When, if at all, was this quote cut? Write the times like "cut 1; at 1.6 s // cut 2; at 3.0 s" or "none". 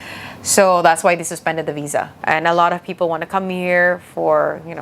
cut 1; at 2.1 s